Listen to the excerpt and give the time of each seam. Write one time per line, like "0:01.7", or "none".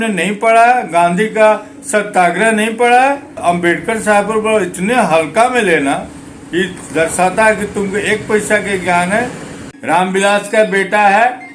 0:03.4
0:09.6